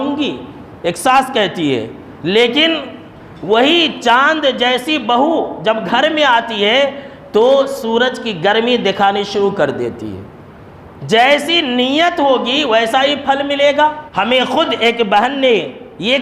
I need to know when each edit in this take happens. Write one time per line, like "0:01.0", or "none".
0:14.0

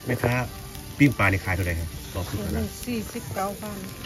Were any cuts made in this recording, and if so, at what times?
none

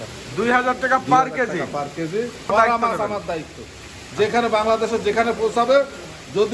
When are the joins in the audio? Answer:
0:02.5

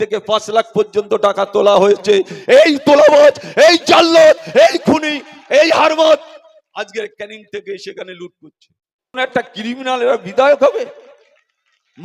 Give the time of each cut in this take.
0:09.2

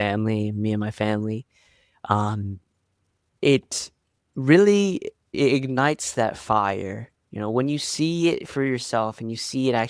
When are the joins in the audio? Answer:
0:05.3

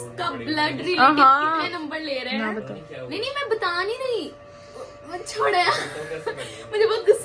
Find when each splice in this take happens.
none

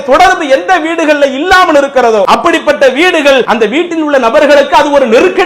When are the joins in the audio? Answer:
0:02.3
0:03.5

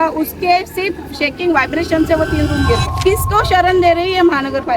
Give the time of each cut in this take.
0:02.9

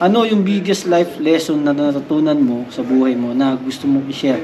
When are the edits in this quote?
none

